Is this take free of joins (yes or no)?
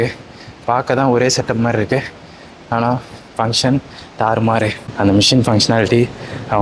no